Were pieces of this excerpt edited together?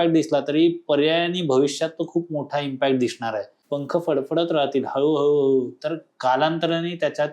yes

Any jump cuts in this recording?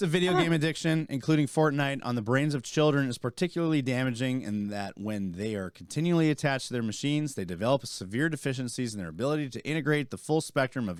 no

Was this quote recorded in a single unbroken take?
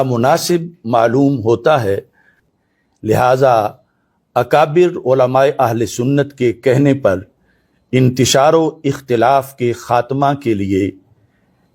no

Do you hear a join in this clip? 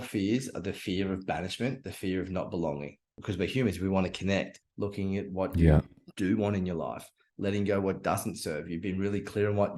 yes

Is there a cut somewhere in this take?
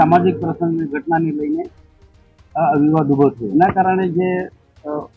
yes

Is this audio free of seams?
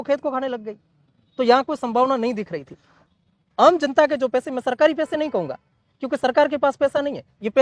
no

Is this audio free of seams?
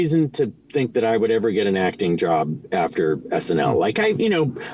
yes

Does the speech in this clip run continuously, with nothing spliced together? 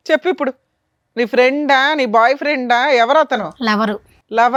yes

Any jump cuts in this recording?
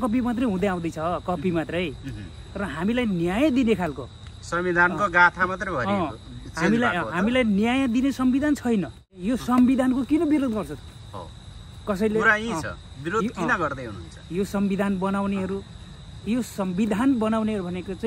yes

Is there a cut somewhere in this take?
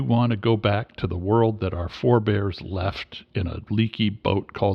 no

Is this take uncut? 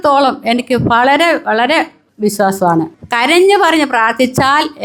yes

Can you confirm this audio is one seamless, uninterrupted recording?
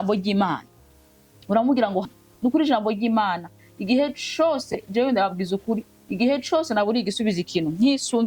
no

